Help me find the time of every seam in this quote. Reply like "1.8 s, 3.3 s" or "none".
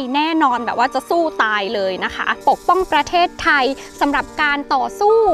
2.4 s